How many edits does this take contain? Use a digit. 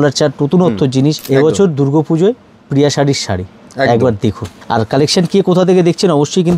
2